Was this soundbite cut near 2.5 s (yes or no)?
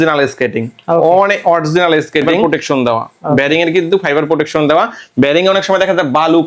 yes